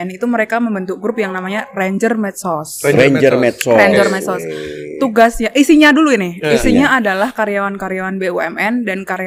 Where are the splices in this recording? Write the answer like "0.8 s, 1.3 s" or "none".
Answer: none